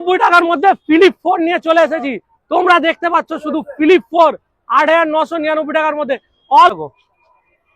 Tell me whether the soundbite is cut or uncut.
cut